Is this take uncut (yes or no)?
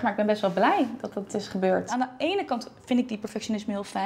no